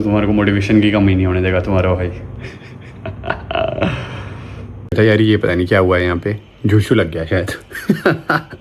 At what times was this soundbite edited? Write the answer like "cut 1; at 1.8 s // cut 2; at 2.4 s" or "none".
cut 1; at 4.9 s